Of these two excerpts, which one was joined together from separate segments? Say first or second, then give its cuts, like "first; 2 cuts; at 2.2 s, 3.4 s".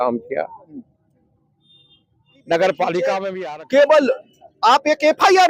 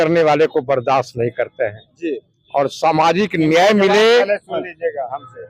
first; 1 cut; at 3.3 s